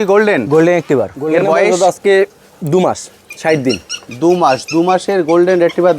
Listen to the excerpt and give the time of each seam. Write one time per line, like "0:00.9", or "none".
0:01.6